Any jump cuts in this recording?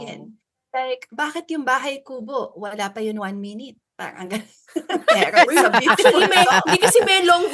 no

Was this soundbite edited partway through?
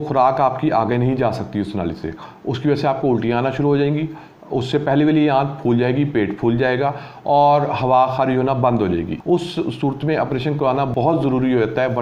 yes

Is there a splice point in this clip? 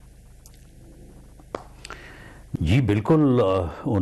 yes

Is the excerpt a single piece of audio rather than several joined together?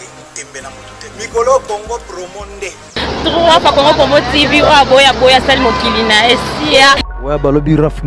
no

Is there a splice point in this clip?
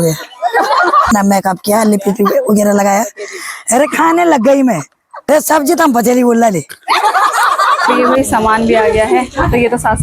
yes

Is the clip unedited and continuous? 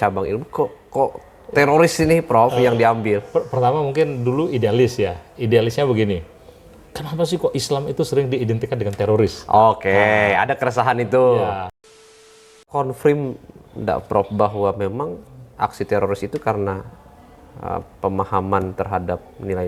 no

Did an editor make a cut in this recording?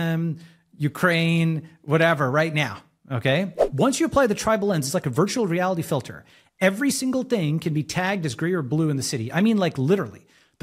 yes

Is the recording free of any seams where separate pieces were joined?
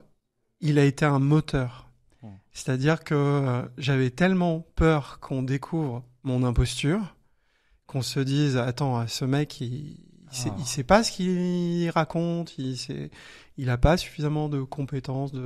yes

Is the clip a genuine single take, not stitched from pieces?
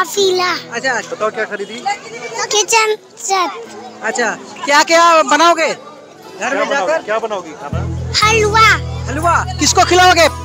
no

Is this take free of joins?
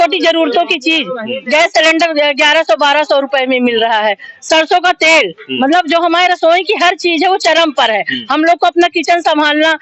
yes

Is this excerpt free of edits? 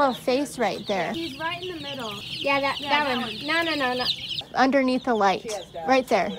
no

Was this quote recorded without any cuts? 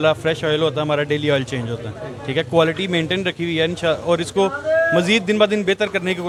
yes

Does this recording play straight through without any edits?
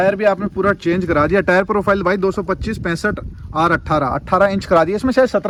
yes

